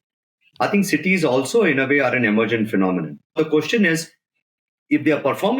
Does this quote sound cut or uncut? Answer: cut